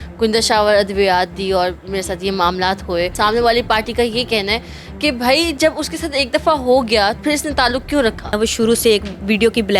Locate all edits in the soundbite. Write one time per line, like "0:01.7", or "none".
0:03.1
0:07.2
0:08.3